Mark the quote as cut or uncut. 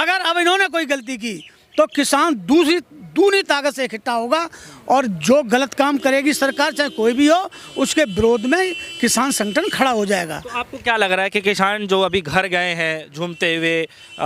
uncut